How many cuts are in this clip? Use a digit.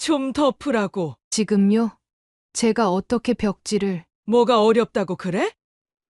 1